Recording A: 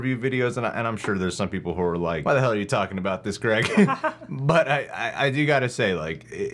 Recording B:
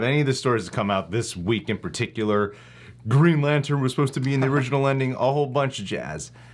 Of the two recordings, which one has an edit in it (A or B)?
A